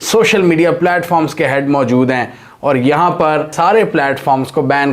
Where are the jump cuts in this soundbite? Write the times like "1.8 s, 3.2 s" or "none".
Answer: 3.5 s

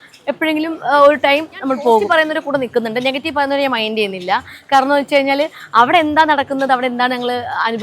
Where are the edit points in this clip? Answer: 2.0 s

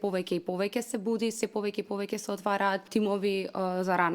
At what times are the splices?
2.9 s

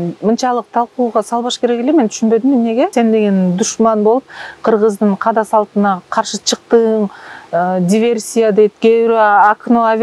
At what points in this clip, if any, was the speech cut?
2.9 s

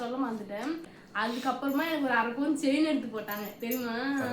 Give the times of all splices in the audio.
1.0 s

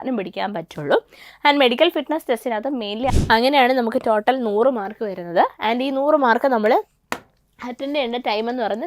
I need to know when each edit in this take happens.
3.1 s

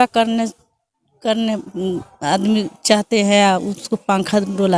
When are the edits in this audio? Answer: none

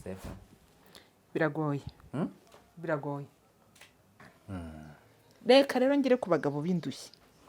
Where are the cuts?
4.3 s

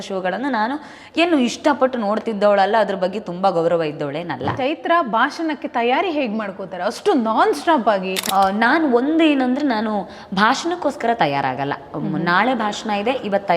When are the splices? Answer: 4.5 s, 8.2 s

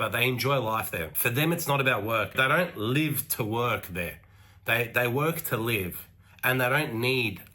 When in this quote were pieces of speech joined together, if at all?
none

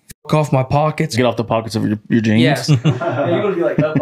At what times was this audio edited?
1.1 s, 2.6 s

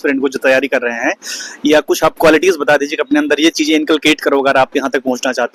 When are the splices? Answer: none

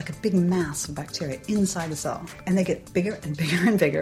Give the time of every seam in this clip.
2.3 s

